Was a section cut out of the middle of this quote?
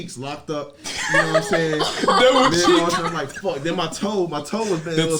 no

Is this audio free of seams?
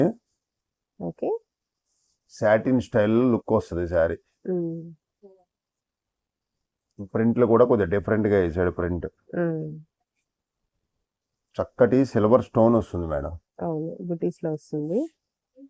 yes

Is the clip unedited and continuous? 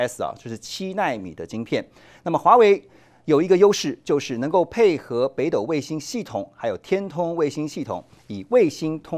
yes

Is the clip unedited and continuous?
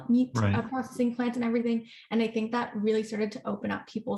yes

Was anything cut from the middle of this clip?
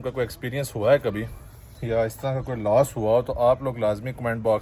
no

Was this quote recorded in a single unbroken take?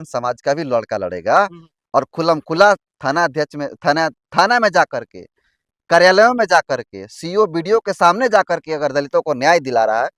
yes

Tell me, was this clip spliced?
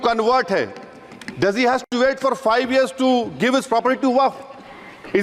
no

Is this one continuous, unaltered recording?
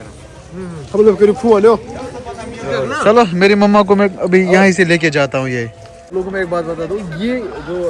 no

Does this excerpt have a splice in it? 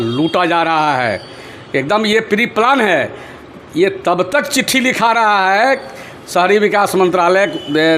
no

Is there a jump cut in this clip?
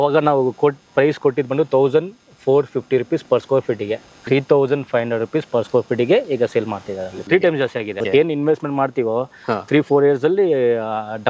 yes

